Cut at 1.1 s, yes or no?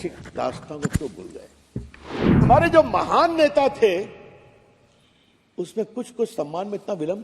no